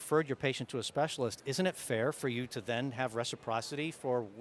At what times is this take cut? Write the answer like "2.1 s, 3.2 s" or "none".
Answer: none